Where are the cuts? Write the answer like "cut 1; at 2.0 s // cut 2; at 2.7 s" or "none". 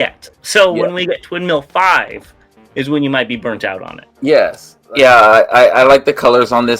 cut 1; at 4.7 s